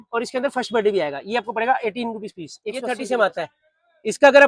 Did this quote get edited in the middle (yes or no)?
no